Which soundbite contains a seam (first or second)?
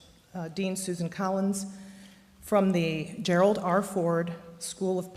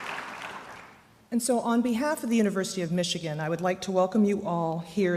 first